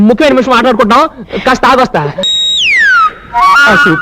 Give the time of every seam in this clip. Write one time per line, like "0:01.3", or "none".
0:02.2